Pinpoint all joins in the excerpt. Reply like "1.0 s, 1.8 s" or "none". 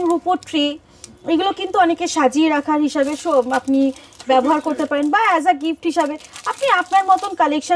none